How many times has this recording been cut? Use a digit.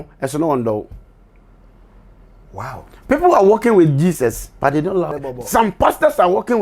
1